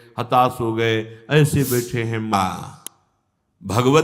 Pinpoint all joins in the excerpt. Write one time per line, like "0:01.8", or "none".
0:02.3